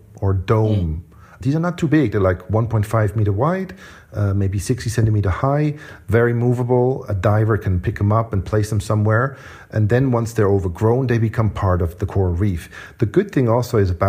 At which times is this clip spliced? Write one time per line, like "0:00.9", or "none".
0:09.5